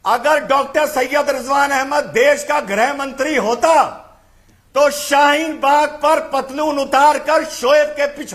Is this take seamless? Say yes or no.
yes